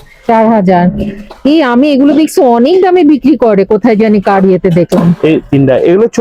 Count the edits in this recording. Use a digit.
0